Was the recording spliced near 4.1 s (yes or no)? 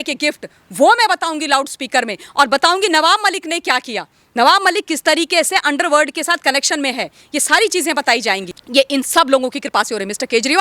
no